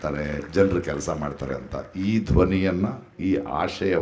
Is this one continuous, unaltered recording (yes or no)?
yes